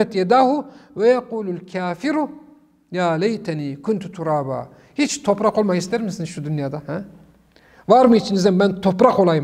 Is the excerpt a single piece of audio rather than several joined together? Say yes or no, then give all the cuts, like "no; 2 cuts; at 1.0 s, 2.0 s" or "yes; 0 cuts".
yes; 0 cuts